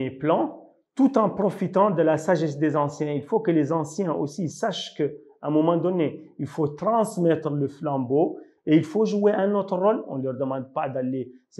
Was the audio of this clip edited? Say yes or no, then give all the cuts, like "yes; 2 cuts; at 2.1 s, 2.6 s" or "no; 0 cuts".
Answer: no; 0 cuts